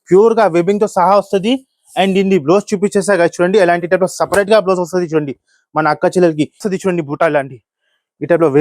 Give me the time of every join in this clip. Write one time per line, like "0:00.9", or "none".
0:06.7